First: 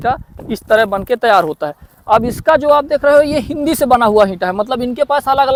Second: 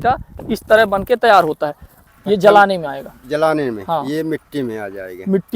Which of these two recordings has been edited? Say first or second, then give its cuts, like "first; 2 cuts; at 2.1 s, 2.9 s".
second; 1 cut; at 1.9 s